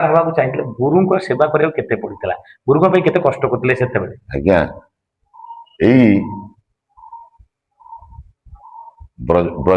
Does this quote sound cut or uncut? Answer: uncut